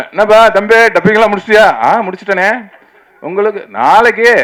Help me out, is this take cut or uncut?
uncut